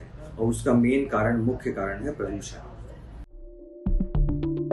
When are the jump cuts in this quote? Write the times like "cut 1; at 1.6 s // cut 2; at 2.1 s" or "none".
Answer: cut 1; at 3.2 s